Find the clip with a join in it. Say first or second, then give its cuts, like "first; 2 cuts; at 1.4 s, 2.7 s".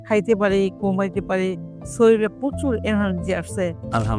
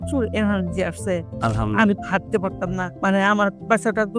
second; 1 cut; at 2.9 s